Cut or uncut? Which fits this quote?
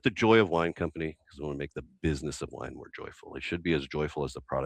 uncut